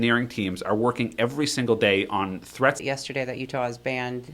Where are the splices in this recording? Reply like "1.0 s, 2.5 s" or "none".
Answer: 2.8 s